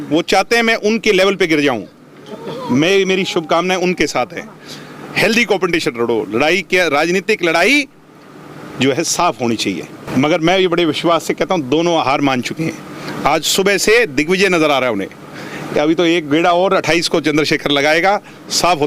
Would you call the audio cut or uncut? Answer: cut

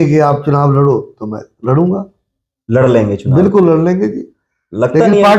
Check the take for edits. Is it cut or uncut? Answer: uncut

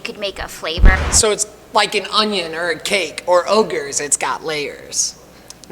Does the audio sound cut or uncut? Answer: cut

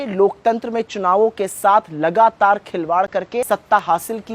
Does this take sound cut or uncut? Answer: cut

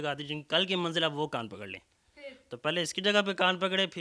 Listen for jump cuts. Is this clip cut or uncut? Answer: uncut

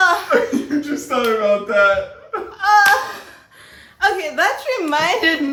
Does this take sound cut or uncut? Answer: uncut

